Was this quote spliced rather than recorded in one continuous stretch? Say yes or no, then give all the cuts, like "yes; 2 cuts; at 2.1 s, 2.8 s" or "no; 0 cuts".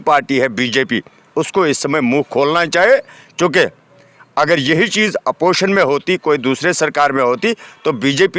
no; 0 cuts